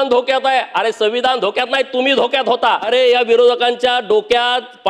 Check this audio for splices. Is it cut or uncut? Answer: cut